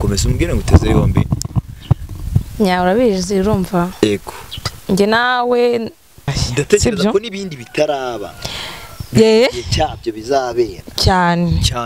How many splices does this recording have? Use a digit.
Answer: 1